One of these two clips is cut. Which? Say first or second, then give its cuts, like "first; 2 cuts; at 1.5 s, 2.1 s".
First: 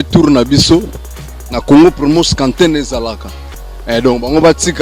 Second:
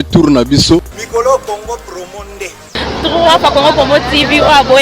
second; 1 cut; at 1.0 s